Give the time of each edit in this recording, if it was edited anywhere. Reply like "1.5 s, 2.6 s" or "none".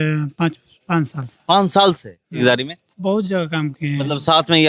2.4 s